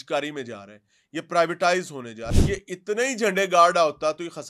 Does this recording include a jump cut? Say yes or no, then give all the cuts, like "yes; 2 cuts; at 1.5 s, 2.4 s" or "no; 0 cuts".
yes; 1 cut; at 2.3 s